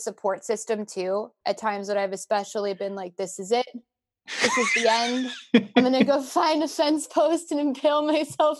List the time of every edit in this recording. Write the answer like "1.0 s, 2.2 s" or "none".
1.3 s